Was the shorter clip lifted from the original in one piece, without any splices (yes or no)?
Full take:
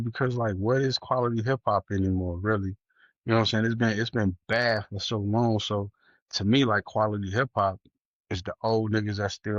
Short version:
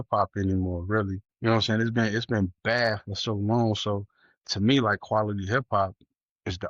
no